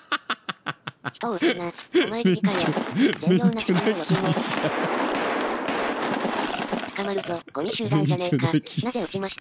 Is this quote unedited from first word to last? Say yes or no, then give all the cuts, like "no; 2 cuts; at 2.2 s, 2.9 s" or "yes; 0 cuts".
yes; 0 cuts